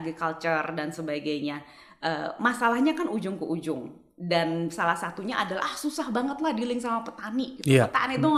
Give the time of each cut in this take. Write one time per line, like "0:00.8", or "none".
none